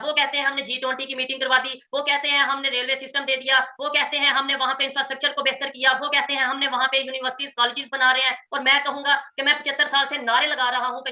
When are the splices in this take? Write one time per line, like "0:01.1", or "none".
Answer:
none